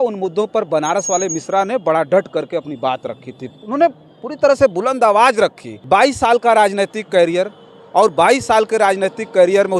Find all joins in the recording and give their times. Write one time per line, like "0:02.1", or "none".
0:05.7